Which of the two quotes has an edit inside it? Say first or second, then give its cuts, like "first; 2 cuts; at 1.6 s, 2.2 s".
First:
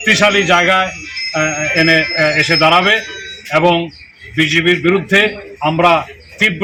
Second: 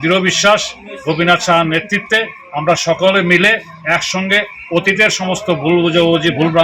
second; 1 cut; at 5.7 s